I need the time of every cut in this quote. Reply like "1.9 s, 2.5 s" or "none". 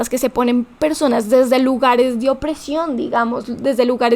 none